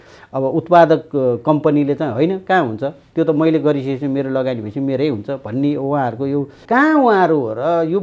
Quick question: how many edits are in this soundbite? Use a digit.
1